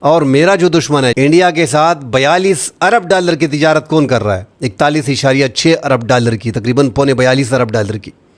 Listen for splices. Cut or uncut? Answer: cut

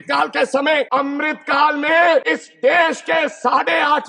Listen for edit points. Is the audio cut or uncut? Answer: cut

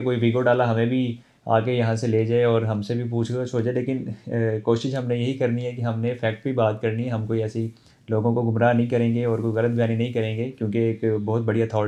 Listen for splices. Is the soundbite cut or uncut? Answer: uncut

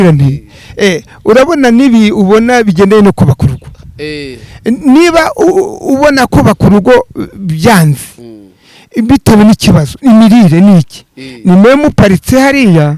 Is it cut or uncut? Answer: uncut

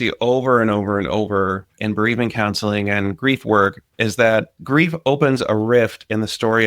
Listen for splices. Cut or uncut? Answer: cut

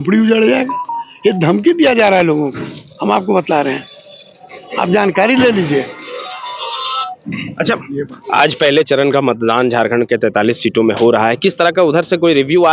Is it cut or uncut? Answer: uncut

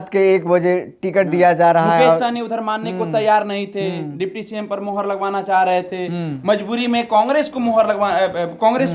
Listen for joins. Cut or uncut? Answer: uncut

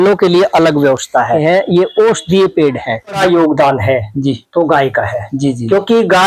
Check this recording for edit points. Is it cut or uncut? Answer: cut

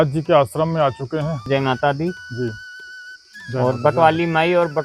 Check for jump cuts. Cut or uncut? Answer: cut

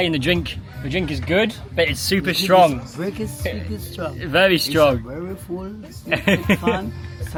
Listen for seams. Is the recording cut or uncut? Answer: uncut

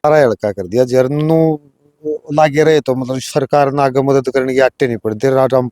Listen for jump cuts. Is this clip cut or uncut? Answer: uncut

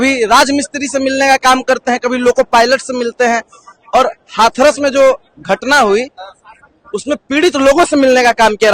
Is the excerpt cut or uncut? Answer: uncut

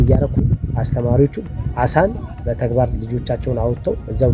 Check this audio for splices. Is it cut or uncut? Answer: cut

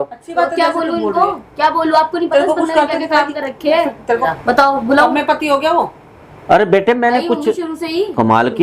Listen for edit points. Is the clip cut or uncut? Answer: cut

